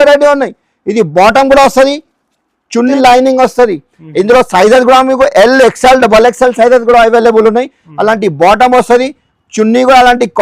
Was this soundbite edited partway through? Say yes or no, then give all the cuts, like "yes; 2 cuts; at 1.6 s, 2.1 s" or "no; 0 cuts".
yes; 1 cut; at 2.9 s